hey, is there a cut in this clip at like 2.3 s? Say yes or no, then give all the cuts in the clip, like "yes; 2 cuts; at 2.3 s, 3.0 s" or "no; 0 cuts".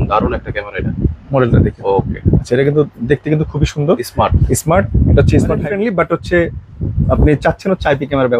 no; 1 cut; at 5.6 s